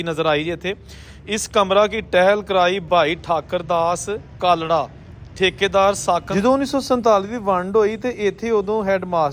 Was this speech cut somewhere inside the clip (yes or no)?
yes